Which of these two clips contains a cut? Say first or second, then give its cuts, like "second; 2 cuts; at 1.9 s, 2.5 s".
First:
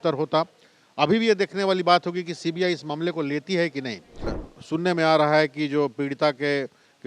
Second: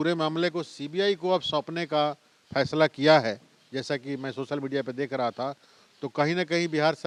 first; 1 cut; at 4.4 s